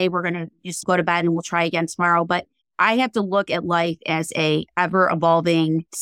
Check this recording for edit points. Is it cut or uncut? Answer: uncut